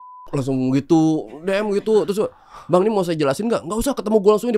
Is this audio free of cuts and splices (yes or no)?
yes